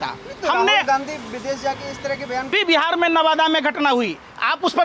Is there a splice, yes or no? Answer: yes